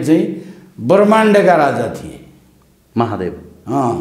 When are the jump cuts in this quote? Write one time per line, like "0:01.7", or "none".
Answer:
none